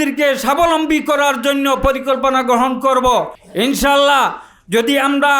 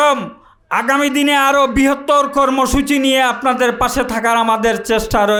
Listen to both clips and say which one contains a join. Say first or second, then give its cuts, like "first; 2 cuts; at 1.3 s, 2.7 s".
first; 1 cut; at 3.4 s